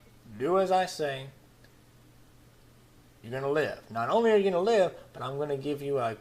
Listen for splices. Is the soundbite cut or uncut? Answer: cut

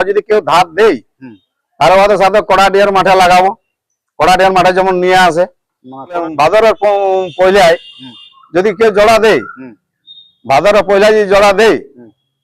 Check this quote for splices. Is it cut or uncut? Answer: cut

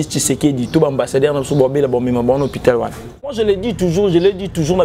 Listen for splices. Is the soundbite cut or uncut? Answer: cut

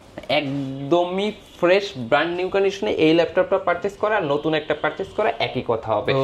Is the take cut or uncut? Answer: uncut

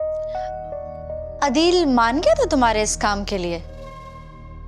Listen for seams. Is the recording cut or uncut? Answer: uncut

